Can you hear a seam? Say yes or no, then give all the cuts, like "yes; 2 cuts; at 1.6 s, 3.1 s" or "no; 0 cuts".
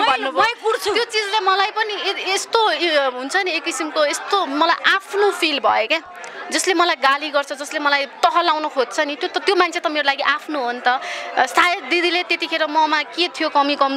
no; 0 cuts